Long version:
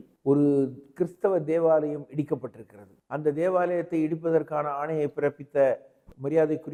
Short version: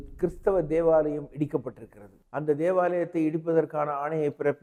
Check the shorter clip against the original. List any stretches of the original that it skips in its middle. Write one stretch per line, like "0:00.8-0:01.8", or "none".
none